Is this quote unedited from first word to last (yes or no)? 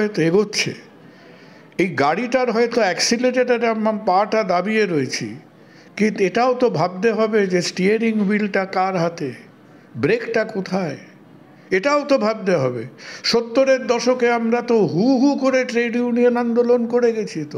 yes